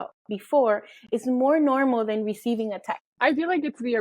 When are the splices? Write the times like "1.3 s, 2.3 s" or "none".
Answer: 3.0 s